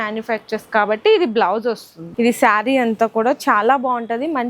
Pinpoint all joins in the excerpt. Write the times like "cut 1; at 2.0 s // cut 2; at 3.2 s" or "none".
cut 1; at 1.9 s